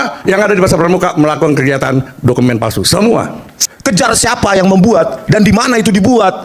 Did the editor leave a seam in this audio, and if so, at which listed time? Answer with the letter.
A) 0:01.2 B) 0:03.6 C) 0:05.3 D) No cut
B